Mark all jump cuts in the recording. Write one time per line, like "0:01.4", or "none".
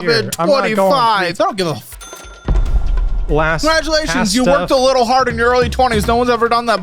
0:01.3